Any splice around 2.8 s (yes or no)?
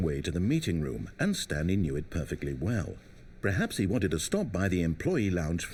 no